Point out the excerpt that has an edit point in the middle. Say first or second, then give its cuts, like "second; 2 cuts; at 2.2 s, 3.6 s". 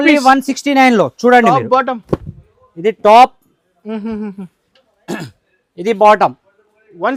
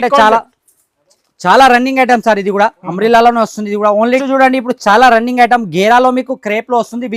second; 1 cut; at 4.1 s